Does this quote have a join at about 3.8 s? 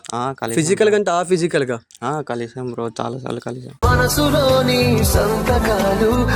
yes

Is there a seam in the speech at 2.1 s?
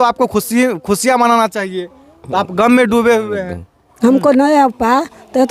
no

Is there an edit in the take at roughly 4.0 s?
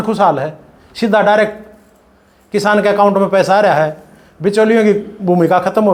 no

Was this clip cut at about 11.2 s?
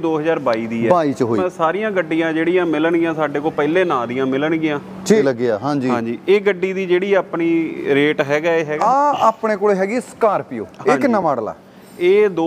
no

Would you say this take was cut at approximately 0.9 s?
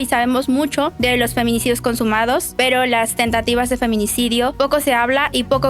yes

